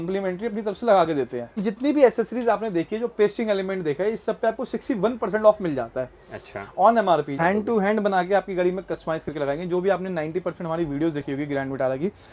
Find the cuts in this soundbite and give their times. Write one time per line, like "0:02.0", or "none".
0:01.6
0:07.3